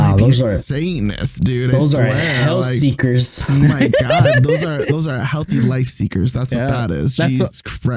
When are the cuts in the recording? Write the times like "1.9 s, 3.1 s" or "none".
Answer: none